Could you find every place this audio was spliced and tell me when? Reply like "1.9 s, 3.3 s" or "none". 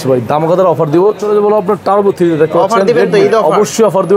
1.2 s